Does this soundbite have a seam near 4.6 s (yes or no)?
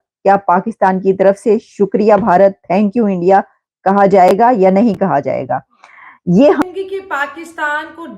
no